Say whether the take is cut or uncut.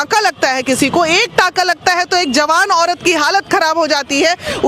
uncut